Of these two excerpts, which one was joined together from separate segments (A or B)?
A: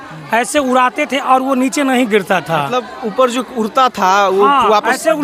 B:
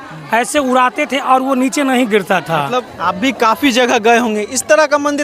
B